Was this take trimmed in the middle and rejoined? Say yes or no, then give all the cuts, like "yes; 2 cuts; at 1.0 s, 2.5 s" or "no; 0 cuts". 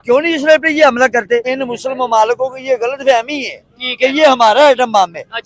yes; 1 cut; at 1.5 s